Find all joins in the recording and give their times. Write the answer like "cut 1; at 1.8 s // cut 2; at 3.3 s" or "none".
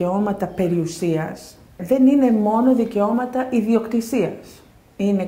cut 1; at 1.8 s

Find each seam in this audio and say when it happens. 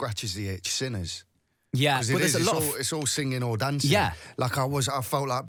none

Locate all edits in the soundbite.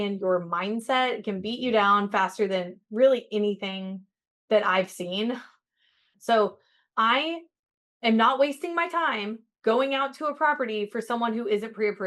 cut 1; at 6.1 s

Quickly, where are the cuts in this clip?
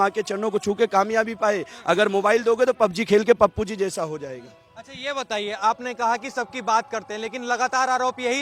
none

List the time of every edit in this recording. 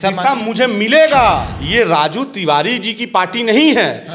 cut 1; at 1.6 s

